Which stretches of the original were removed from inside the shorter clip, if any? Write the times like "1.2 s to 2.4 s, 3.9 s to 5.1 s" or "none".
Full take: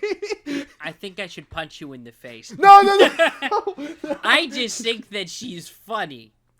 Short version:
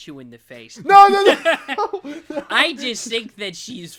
none